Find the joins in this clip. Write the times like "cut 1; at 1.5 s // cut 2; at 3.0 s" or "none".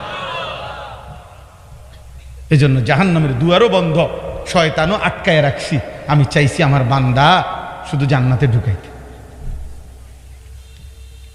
none